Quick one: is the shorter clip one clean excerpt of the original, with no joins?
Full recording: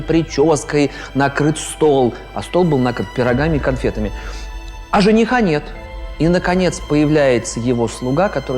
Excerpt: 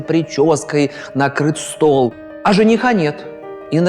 no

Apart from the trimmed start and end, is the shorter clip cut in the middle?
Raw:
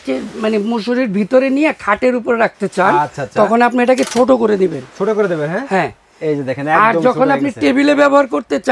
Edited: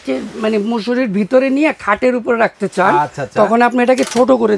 no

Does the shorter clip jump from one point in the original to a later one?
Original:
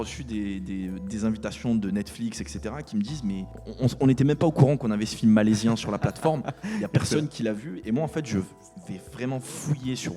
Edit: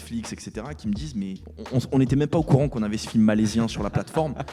no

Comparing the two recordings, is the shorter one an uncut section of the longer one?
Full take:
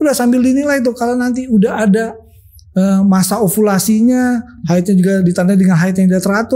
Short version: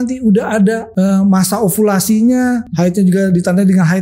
no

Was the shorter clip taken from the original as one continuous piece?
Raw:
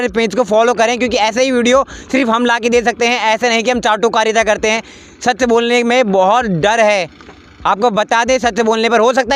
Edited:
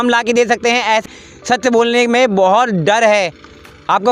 no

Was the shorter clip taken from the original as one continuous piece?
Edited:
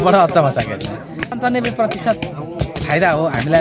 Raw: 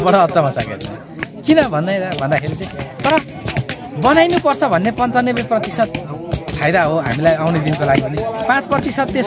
no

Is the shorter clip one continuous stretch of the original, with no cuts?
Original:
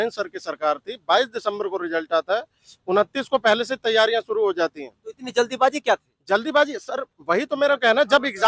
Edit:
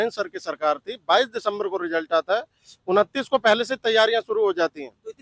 yes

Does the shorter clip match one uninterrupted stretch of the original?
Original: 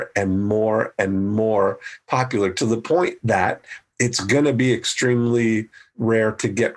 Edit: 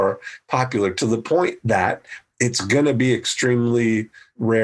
yes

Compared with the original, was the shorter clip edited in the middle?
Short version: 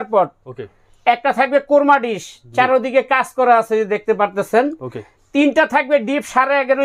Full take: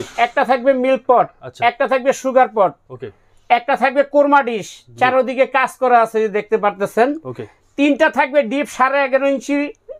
no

